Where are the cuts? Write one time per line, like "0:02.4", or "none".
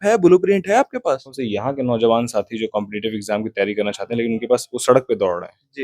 0:01.4